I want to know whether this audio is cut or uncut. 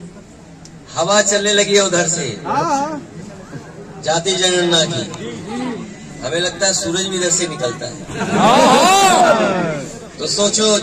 uncut